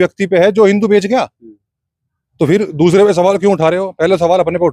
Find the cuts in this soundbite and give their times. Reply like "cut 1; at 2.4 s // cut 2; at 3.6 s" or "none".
none

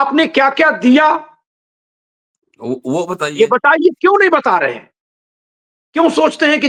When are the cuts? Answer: none

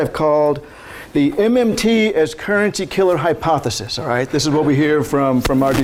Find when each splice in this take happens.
none

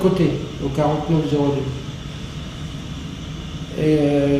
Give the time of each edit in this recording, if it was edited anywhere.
cut 1; at 2.7 s

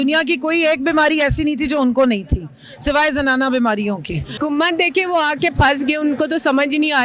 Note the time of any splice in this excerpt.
cut 1; at 4.3 s

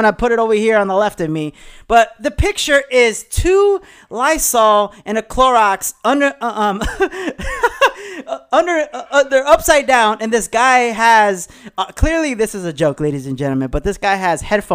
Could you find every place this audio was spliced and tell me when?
none

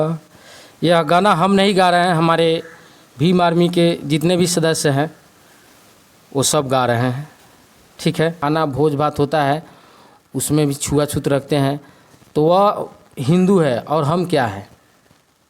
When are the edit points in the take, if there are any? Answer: cut 1; at 8.4 s

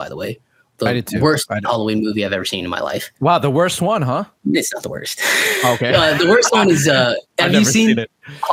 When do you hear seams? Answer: none

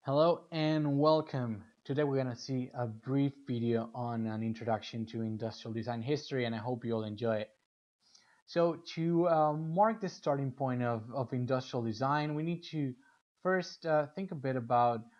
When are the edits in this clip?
none

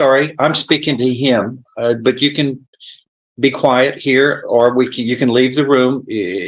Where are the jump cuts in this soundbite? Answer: none

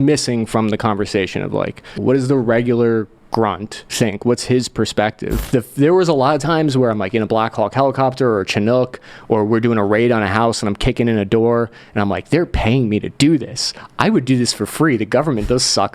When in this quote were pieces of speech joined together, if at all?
cut 1; at 2.0 s // cut 2; at 3.8 s // cut 3; at 5.3 s

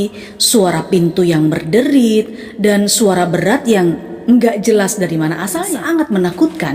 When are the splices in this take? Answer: cut 1; at 5.6 s

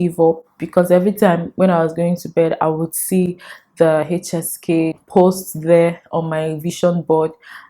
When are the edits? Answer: cut 1; at 5.0 s

